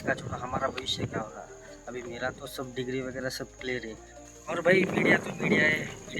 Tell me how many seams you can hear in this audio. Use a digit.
1